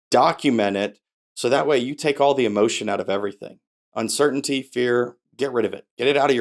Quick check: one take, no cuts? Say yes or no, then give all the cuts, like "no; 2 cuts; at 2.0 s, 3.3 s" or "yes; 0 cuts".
yes; 0 cuts